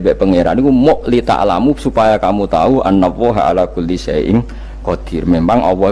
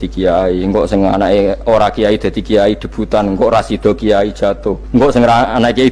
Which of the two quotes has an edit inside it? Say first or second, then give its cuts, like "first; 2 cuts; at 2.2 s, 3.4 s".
second; 1 cut; at 4.8 s